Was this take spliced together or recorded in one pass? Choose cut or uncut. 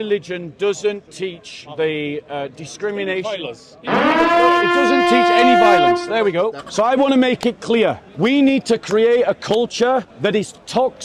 cut